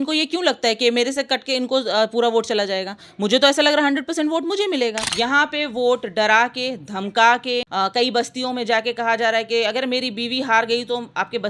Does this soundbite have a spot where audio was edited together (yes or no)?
yes